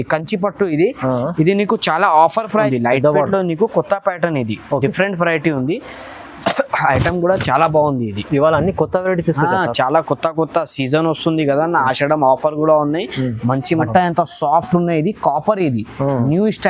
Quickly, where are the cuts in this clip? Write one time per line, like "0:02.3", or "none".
0:02.7
0:13.9